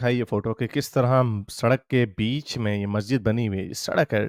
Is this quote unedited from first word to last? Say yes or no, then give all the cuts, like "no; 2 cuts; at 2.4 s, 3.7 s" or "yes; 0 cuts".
yes; 0 cuts